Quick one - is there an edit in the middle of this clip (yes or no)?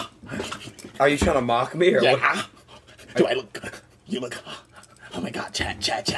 no